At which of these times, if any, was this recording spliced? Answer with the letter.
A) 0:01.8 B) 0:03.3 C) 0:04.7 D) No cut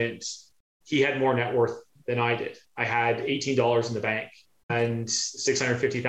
C